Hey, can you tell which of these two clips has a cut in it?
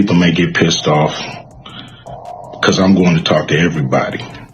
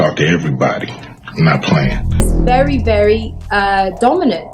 second; 1 cut; at 2.3 s

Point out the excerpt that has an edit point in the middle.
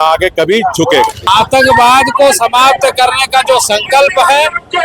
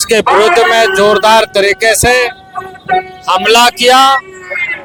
first; 1 cut; at 1.2 s

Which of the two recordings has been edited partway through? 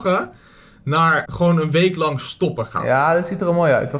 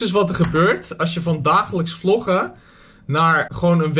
first; 1 cut; at 2.7 s

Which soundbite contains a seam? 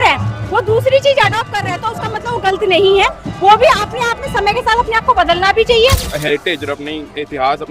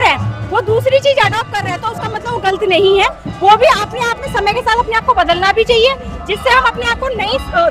first; 1 cut; at 6.1 s

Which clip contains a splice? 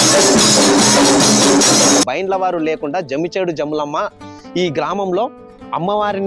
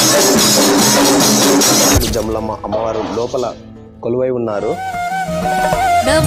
second; 2 cuts; at 2.0 s, 4.8 s

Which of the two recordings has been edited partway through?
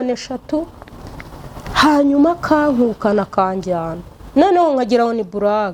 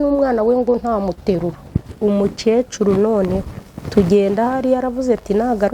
second; 1 cut; at 1.6 s

